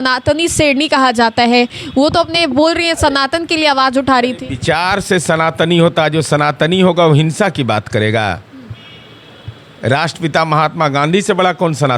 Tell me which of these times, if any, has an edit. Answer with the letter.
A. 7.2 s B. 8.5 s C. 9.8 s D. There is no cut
D